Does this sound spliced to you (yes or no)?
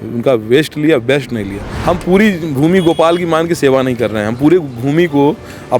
yes